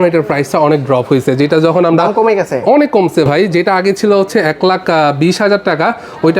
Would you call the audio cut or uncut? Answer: uncut